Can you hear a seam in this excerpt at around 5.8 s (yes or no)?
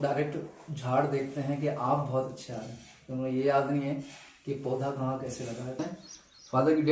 yes